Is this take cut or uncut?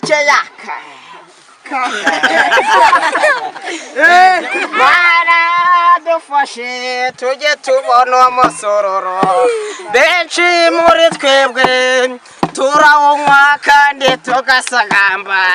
cut